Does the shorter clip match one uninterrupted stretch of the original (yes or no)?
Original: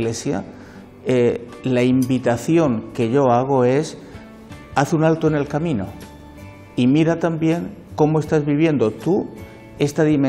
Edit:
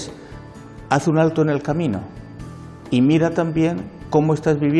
yes